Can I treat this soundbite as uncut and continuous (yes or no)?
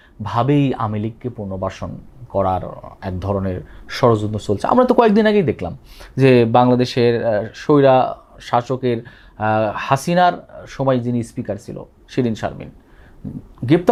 yes